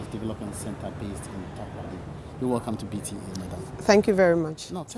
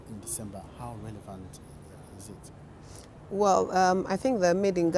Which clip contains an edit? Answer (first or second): second